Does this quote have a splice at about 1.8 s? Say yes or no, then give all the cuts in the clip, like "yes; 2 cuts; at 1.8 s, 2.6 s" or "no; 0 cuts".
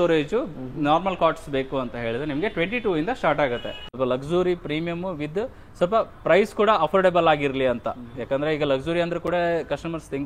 no; 1 cut; at 3.8 s